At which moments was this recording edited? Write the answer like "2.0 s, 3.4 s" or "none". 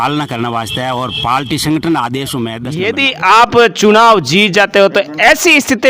2.7 s